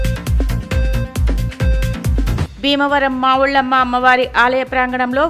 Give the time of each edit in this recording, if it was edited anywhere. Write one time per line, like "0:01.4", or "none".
none